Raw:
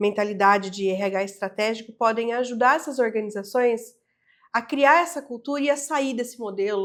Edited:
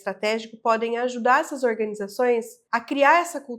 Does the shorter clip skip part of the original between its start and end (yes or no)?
yes